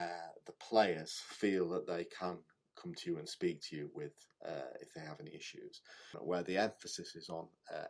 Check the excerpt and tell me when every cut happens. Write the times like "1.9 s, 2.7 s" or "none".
6.2 s